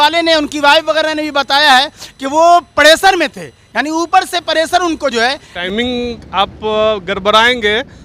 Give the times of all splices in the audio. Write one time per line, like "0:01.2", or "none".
0:05.6